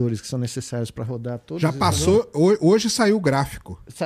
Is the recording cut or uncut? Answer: uncut